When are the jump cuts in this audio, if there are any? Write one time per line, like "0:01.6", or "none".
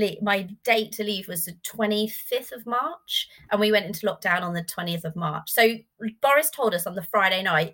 none